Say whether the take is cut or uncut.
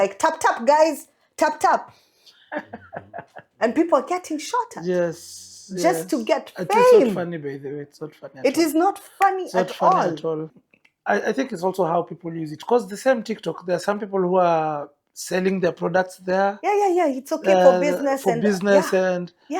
cut